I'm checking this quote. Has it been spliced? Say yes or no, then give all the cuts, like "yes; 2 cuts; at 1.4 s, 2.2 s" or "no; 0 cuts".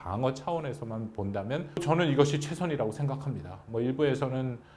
yes; 1 cut; at 1.8 s